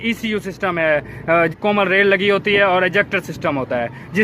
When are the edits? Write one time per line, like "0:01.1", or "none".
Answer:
0:01.5